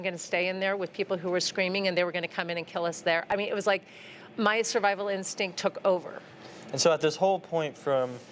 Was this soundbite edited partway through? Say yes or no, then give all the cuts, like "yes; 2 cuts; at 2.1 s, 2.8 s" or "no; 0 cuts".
no; 0 cuts